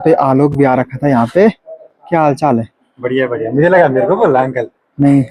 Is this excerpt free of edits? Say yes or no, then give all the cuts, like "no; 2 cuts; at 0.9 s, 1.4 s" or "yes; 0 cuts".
yes; 0 cuts